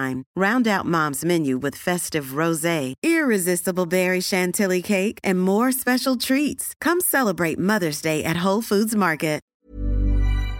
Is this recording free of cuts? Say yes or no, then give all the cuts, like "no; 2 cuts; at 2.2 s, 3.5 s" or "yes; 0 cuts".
no; 1 cut; at 9.5 s